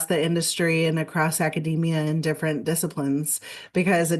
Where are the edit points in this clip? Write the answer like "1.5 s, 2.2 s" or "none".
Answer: none

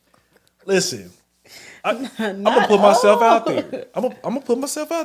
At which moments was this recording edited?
none

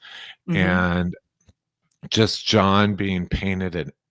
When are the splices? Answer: none

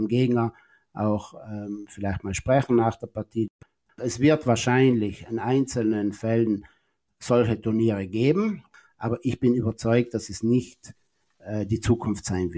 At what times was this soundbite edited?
3.8 s, 8.7 s

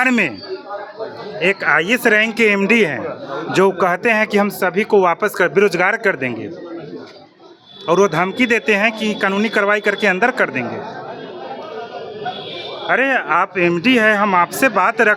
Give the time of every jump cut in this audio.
none

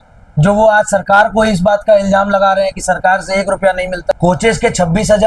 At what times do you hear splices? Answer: 4.2 s

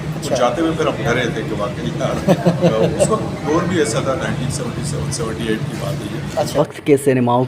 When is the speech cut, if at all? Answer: 6.5 s

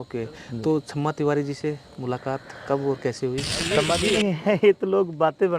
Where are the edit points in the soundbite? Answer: 3.8 s

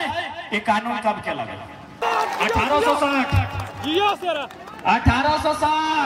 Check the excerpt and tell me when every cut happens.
2.0 s

